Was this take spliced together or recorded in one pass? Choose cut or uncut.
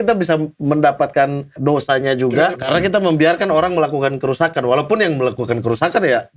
cut